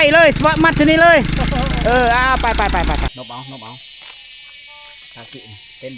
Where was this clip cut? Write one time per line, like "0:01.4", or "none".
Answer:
0:03.1

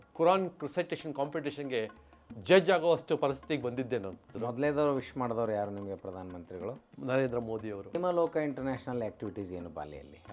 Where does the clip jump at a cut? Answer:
0:04.2
0:08.0

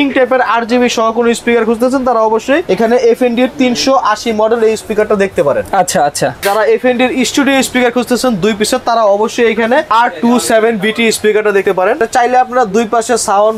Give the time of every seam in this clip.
0:02.6
0:06.4
0:09.9
0:11.8

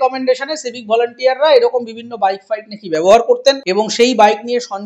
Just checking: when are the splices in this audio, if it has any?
0:03.6

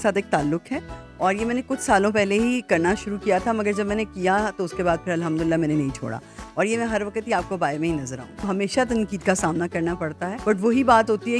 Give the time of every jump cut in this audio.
0:08.5
0:10.3

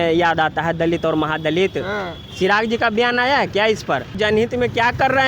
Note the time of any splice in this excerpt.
0:04.2

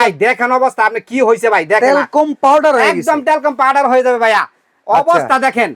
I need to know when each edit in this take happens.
none

